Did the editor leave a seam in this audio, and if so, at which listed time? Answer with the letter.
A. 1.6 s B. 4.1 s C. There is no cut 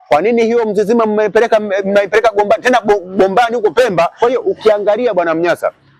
B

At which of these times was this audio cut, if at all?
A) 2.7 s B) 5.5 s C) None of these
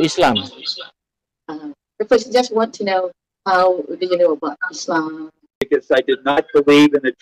B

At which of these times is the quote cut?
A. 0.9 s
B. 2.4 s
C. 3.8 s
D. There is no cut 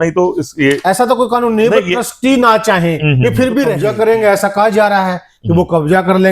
C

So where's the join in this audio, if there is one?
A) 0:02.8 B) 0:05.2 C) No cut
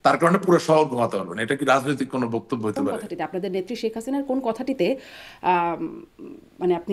A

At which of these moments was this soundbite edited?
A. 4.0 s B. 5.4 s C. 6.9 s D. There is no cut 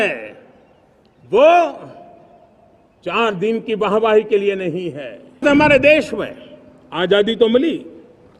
B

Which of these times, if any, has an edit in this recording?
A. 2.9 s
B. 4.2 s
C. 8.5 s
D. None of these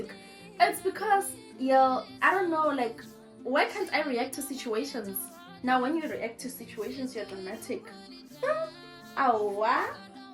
D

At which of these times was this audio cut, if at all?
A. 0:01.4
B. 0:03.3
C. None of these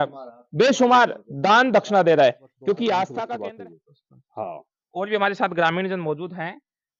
B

